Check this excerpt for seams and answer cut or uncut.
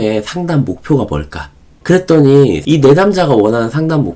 cut